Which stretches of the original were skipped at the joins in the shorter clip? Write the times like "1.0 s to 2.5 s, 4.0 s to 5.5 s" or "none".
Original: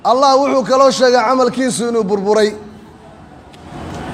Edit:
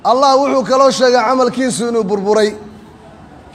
none